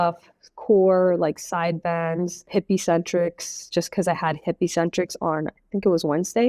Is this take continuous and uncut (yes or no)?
no